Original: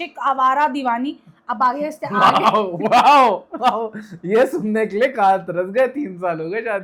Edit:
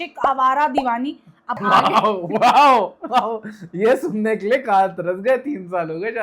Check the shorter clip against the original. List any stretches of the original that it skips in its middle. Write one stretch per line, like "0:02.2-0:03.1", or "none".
0:01.5-0:02.0